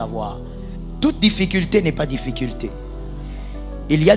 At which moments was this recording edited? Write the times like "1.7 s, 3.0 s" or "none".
0.9 s